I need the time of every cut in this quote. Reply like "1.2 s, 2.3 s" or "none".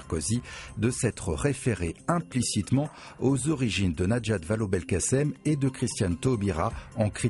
1.1 s